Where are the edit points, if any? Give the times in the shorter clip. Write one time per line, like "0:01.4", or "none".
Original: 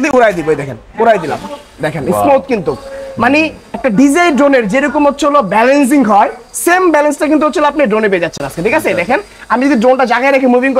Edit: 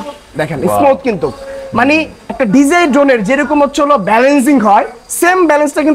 none